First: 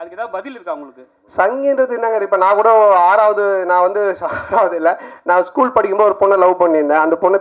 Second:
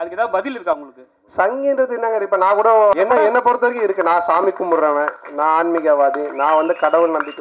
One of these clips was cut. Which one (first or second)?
second